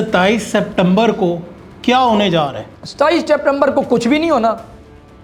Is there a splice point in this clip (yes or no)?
no